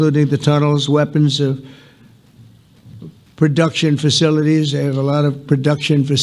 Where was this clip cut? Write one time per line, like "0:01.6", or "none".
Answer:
none